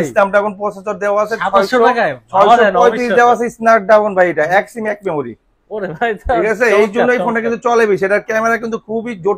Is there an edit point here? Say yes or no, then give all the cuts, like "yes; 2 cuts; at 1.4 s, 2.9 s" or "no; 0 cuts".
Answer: no; 0 cuts